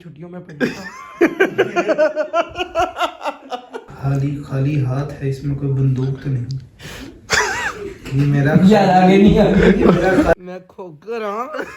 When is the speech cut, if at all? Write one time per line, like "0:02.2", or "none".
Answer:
0:03.9
0:10.3